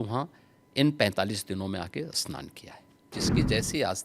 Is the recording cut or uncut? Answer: cut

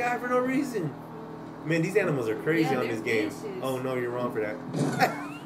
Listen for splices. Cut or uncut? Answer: uncut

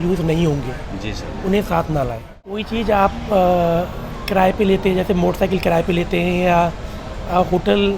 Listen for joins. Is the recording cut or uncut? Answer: cut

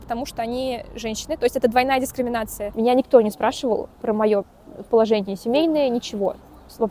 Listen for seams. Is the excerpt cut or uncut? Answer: cut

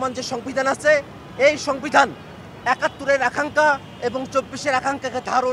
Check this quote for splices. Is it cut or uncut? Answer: uncut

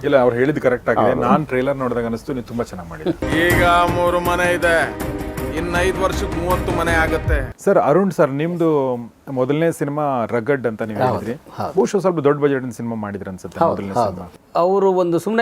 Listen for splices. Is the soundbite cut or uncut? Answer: cut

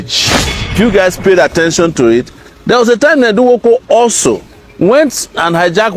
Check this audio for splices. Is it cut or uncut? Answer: cut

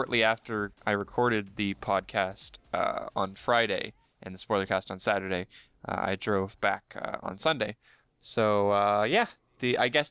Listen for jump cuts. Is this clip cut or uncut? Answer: uncut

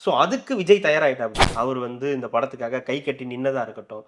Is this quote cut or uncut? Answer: cut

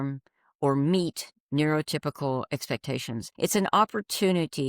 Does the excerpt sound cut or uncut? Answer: cut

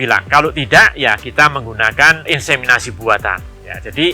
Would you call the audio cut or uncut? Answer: uncut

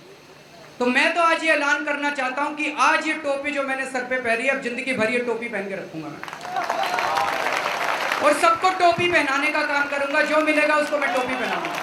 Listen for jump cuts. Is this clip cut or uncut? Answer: uncut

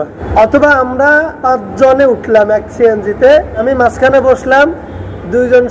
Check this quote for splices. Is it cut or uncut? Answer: cut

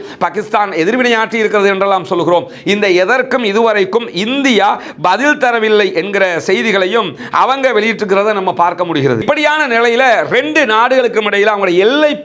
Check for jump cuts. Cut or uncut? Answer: uncut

